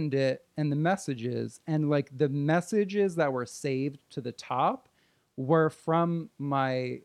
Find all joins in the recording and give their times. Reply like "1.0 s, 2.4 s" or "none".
none